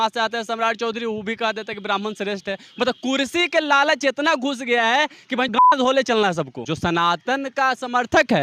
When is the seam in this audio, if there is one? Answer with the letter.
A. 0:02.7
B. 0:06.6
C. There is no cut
B